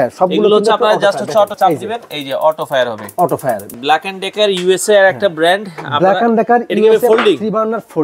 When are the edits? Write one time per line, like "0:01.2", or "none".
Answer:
0:01.5
0:03.7